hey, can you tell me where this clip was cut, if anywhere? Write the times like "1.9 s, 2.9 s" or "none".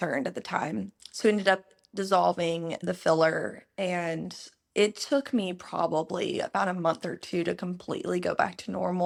none